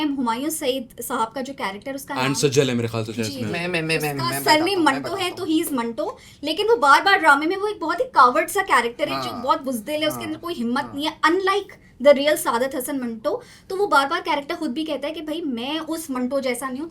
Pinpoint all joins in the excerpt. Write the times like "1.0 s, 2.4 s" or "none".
none